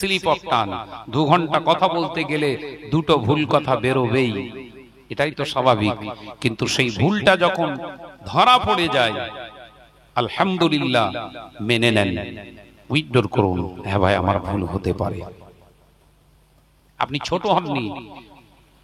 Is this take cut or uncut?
uncut